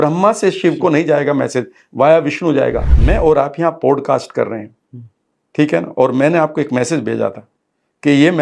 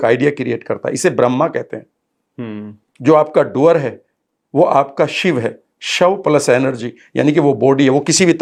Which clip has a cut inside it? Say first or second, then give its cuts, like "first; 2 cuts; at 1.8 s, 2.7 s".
first; 1 cut; at 2.9 s